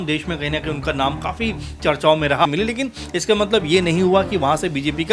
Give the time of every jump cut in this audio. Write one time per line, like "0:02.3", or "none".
0:02.5